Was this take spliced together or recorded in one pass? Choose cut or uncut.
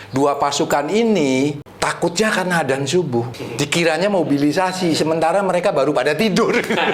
cut